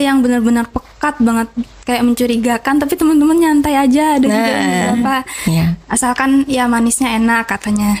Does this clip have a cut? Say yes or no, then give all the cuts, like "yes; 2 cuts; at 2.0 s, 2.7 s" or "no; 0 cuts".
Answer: no; 0 cuts